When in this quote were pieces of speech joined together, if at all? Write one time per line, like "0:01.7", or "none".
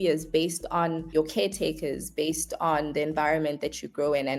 0:01.0